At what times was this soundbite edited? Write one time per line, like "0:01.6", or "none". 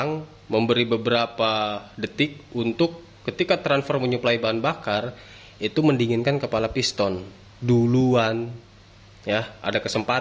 none